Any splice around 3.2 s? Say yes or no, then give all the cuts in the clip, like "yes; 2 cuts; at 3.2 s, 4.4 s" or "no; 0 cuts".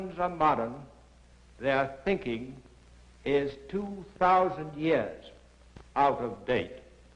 yes; 1 cut; at 3.2 s